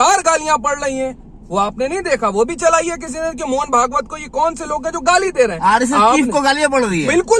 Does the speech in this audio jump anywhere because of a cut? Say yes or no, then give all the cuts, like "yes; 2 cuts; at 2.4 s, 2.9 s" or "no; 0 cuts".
no; 0 cuts